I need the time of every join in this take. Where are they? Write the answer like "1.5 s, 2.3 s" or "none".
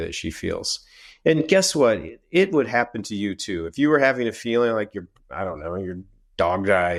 none